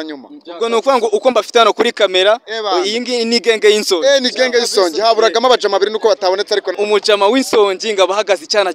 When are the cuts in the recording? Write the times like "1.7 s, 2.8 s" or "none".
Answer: 6.7 s